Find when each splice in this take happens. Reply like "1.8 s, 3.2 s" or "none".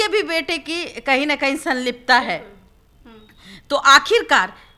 none